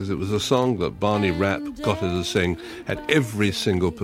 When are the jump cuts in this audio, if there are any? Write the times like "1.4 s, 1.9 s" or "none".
none